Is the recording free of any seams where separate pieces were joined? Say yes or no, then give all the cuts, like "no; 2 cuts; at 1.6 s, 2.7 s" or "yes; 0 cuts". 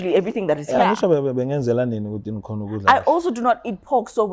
yes; 0 cuts